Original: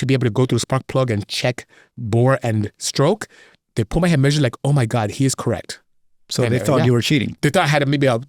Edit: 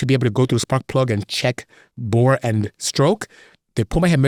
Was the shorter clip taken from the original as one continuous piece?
yes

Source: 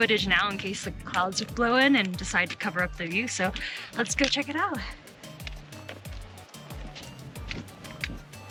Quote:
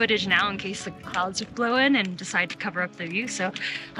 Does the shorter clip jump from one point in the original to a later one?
no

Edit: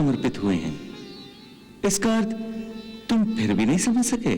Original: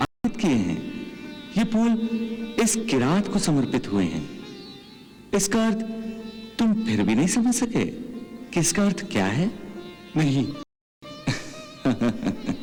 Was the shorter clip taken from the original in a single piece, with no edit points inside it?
yes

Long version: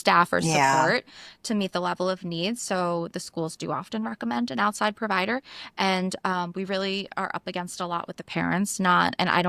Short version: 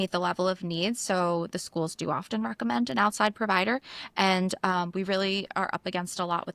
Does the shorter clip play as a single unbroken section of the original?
yes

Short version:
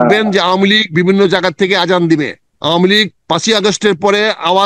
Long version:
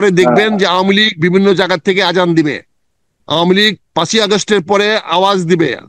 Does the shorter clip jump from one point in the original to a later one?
yes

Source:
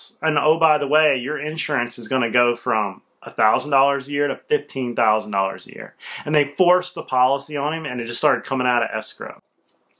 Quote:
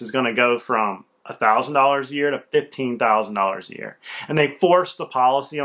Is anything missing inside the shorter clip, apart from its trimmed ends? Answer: no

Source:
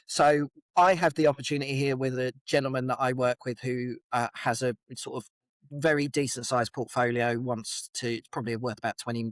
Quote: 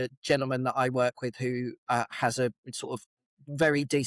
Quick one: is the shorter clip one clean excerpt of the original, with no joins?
yes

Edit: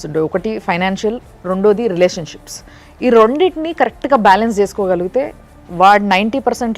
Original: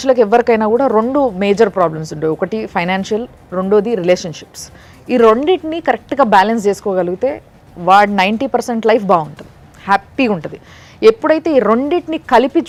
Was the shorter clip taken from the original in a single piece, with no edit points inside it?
yes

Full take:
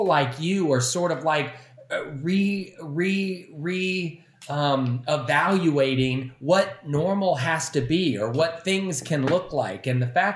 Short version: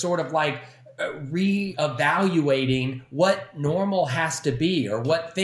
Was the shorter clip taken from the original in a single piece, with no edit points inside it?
no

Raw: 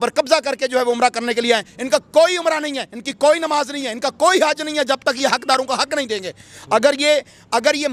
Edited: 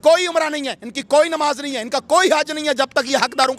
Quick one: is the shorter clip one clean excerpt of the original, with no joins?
yes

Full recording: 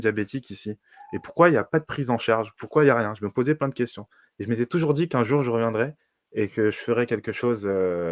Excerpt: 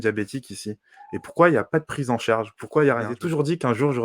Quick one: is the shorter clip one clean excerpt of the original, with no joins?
no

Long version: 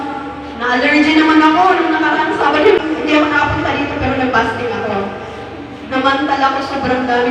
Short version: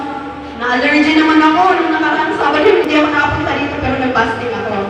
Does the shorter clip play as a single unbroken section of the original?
no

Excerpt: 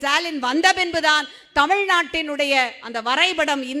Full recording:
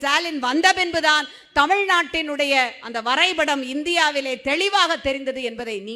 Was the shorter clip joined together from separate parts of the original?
no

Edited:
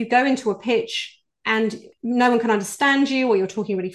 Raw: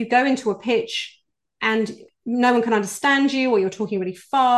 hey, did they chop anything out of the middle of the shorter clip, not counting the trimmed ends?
yes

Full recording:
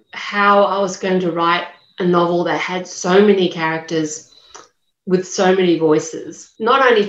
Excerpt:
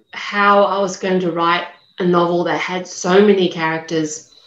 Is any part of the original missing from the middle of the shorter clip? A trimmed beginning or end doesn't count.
no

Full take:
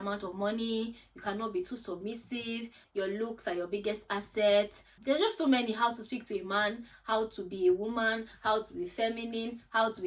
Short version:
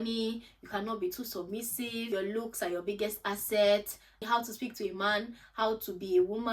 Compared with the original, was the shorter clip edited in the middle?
yes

